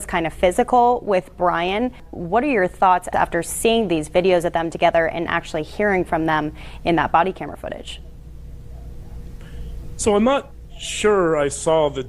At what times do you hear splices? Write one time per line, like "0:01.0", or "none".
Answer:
0:02.1
0:03.1

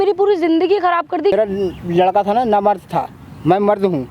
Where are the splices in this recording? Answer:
0:01.3

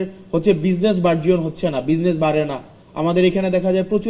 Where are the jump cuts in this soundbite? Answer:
none

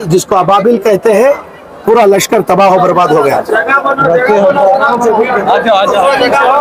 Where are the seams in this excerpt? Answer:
none

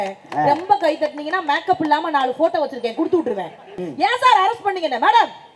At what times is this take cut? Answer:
0:03.8

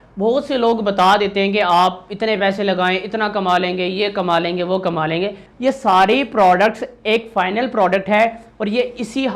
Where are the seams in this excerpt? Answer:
0:05.5

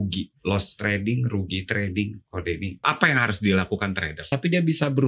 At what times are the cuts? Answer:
0:04.1

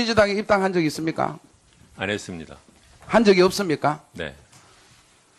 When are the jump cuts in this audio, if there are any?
none

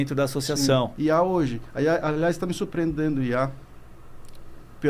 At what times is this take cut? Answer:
0:00.9

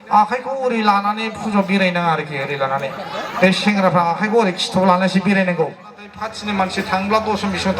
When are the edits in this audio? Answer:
0:06.0

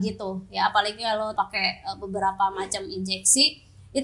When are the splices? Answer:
0:01.3

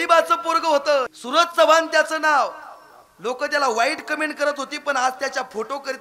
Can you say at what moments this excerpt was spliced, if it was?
0:01.1

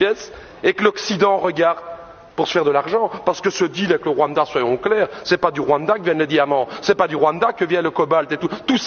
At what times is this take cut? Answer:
none

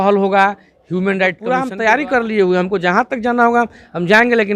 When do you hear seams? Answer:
0:01.5

